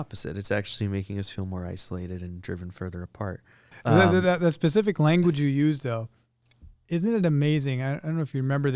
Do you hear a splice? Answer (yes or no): yes